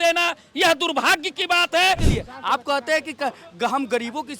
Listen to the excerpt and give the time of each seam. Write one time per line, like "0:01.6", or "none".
0:02.1